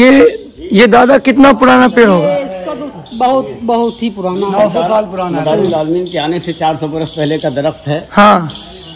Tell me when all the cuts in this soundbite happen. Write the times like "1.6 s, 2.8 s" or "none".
none